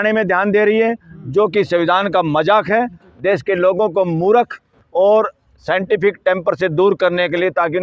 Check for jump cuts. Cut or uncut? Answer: uncut